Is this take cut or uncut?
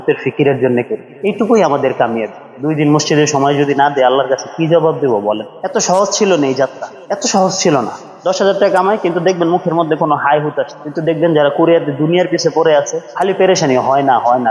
cut